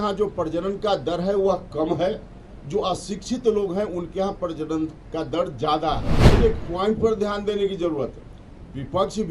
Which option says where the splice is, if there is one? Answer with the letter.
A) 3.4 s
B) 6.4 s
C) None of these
B